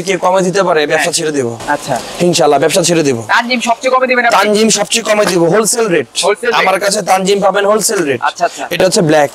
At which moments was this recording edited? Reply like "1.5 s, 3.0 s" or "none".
none